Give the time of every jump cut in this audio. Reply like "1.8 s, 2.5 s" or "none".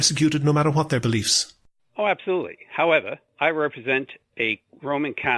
3.2 s